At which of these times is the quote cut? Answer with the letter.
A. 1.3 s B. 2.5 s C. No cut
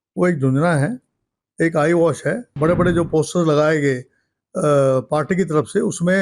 B